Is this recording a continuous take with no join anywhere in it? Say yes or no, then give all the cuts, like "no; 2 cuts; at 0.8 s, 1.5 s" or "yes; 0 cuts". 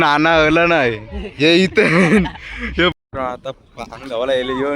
no; 1 cut; at 2.9 s